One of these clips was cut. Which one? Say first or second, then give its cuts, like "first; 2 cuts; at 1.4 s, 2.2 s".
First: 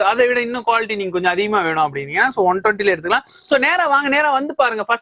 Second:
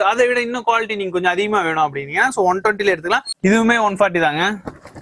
second; 1 cut; at 3.3 s